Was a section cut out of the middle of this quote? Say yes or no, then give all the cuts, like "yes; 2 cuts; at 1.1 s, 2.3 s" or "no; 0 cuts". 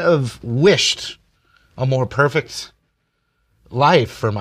no; 0 cuts